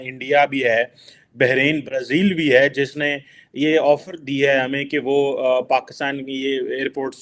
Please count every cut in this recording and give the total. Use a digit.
0